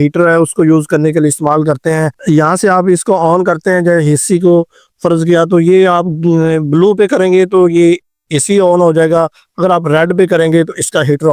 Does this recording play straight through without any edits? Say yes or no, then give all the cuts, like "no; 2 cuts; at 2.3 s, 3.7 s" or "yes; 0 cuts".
yes; 0 cuts